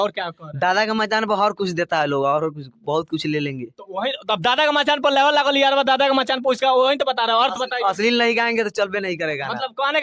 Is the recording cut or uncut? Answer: uncut